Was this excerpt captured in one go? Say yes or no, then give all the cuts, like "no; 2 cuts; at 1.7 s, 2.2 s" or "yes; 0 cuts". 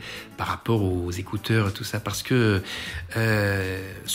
yes; 0 cuts